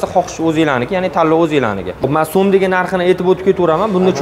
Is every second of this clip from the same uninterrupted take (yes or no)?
no